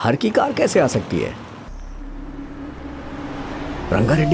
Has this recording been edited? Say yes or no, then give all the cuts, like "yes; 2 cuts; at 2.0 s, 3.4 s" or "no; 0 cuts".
yes; 1 cut; at 1.7 s